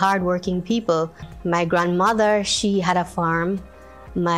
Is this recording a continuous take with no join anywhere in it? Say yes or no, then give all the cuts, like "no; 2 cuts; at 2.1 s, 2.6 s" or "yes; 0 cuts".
no; 1 cut; at 1.3 s